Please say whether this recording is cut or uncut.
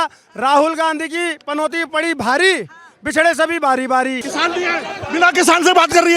cut